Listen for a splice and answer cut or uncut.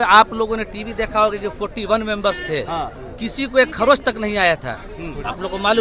uncut